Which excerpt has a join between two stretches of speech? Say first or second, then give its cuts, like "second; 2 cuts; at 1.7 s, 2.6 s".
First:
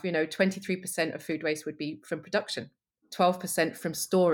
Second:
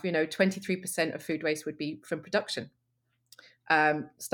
first; 1 cut; at 3.1 s